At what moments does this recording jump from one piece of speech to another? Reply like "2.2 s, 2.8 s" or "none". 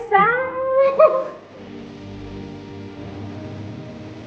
1.2 s